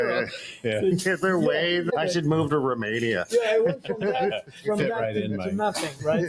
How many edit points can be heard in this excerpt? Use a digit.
1